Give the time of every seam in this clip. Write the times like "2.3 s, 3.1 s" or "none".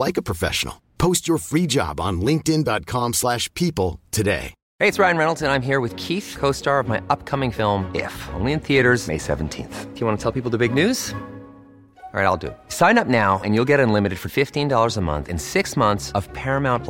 4.6 s